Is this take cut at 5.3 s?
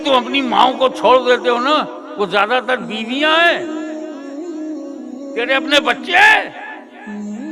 yes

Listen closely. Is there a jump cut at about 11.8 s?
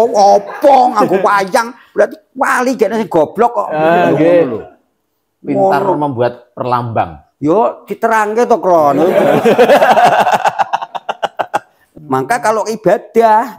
yes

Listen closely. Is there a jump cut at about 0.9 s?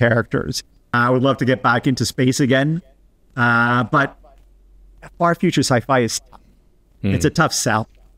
yes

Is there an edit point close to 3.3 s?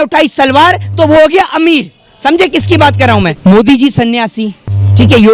yes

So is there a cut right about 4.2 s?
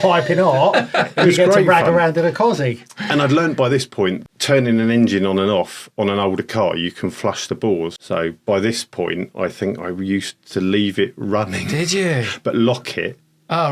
yes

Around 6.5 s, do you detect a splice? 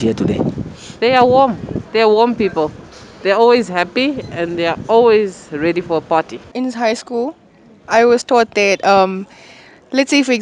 yes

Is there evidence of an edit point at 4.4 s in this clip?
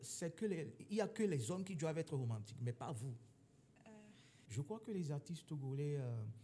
yes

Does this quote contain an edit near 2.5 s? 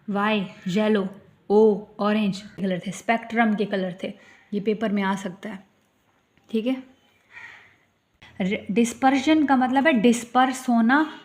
yes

